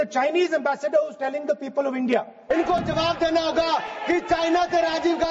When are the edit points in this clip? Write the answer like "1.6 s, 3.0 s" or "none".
2.4 s